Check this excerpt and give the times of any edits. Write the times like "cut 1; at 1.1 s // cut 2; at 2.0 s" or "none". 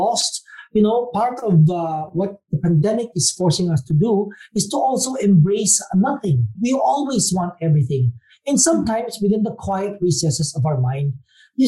cut 1; at 6.6 s